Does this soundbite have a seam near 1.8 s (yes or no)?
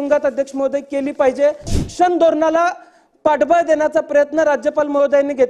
yes